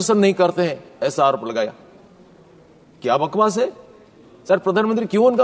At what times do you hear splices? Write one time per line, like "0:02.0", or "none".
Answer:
none